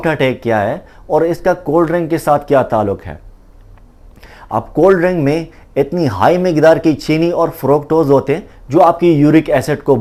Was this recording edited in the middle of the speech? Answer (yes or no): no